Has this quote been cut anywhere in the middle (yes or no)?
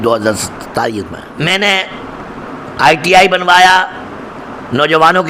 yes